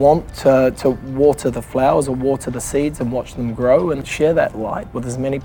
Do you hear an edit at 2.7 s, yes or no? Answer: no